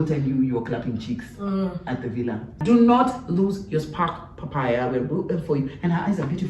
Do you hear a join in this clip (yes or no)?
yes